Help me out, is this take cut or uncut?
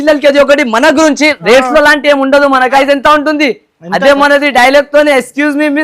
cut